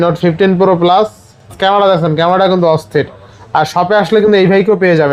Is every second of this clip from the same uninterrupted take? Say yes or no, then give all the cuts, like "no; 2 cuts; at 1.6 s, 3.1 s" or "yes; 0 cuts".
no; 1 cut; at 1.5 s